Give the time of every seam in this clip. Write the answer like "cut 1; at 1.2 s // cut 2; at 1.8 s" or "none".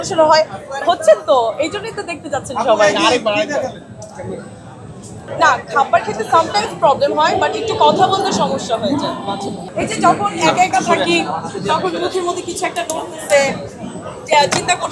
cut 1; at 5.2 s // cut 2; at 9.6 s